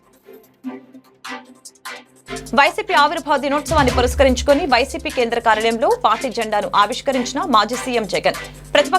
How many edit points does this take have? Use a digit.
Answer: 1